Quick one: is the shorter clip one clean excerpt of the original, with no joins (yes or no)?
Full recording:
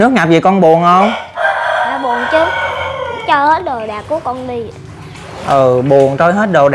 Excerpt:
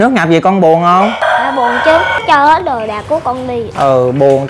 no